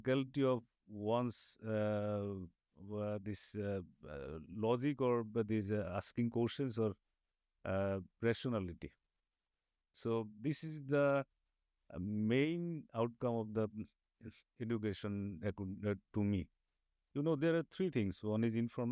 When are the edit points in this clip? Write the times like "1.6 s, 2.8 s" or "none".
17.0 s